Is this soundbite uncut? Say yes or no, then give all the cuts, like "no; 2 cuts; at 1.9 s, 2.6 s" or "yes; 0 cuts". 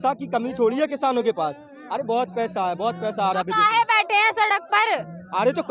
yes; 0 cuts